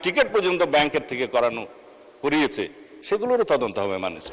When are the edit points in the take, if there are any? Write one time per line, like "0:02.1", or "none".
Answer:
none

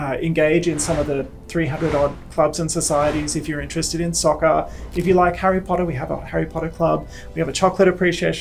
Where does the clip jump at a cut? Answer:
none

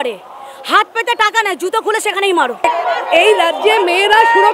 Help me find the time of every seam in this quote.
0:02.6

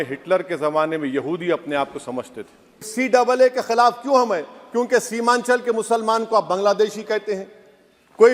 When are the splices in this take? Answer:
0:02.9

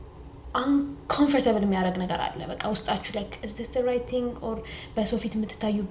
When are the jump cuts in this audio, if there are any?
none

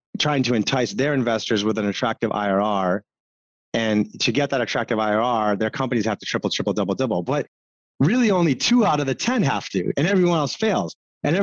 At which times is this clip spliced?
none

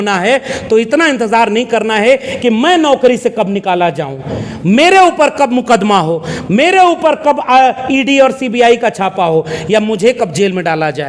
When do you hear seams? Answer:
none

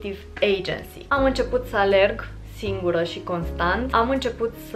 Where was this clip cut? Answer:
0:01.1
0:03.9

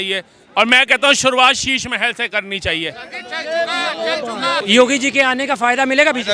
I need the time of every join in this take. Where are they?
0:04.6

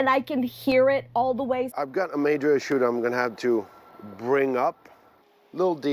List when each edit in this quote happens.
0:01.7
0:04.9

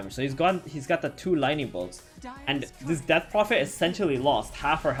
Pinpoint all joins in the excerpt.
none

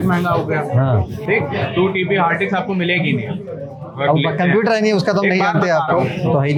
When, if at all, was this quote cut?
none

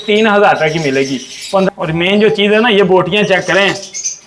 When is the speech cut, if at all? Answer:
0:01.4

